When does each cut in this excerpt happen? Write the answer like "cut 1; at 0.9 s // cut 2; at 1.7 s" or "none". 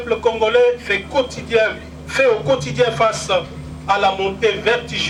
none